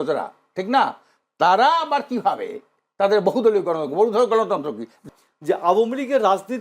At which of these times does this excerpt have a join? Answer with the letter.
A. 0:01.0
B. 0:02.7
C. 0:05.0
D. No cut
C